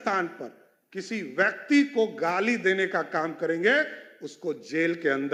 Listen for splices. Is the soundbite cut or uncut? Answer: uncut